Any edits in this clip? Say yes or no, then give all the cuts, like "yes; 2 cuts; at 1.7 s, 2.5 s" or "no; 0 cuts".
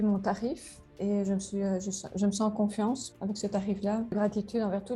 yes; 2 cuts; at 3.1 s, 4.1 s